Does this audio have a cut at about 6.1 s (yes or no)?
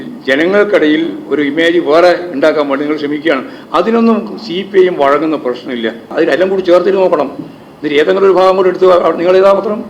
yes